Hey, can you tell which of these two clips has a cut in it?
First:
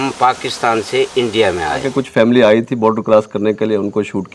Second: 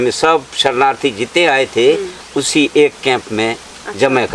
first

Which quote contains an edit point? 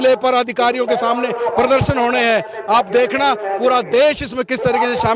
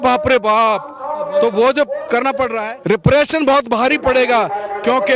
second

